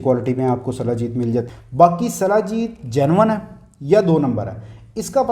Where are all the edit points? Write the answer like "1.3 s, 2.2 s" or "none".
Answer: 1.5 s

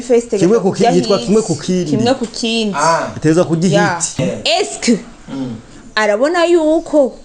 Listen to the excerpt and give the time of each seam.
4.1 s

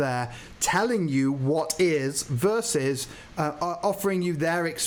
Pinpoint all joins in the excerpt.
none

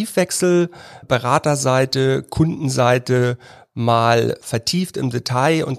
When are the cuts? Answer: 1.0 s, 4.4 s

